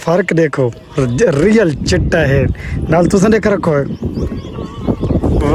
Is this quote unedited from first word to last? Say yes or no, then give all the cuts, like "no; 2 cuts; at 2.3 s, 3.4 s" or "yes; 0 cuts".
yes; 0 cuts